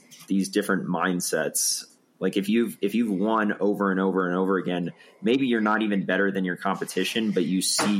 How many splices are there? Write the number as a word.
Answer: one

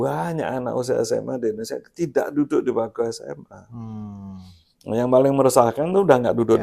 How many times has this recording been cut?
zero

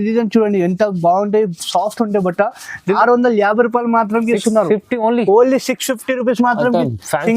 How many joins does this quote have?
one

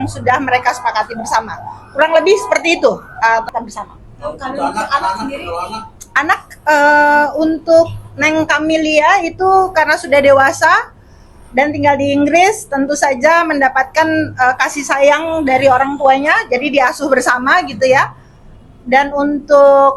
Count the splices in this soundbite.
one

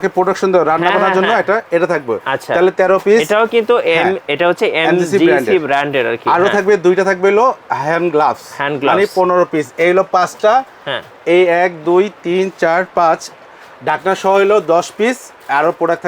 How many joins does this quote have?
zero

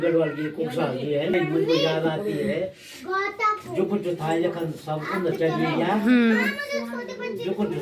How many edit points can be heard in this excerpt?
one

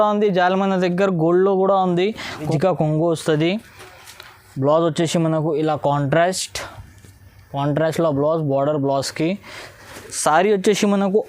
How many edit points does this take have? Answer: one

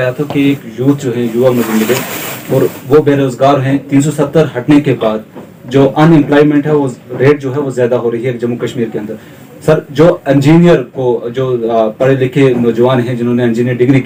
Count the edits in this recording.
zero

